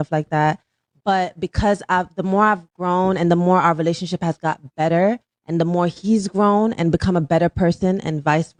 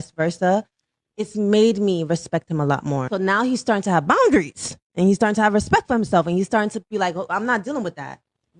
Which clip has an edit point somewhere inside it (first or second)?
second